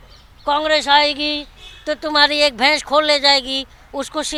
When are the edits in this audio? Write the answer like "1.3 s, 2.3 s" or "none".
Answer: none